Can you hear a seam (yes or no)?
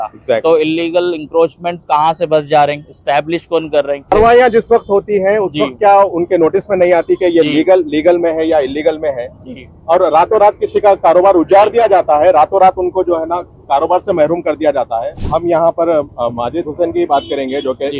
yes